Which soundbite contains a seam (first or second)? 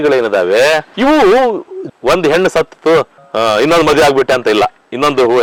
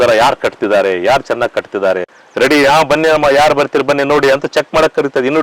second